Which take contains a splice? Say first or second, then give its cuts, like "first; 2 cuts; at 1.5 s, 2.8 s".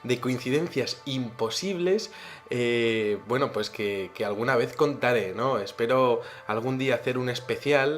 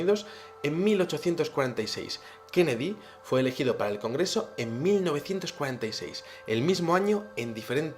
second; 1 cut; at 6.0 s